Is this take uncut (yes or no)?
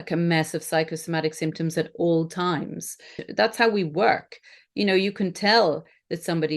no